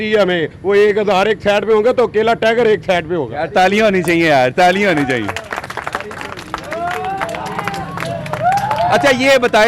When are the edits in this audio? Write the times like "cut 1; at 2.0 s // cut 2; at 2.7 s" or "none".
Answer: none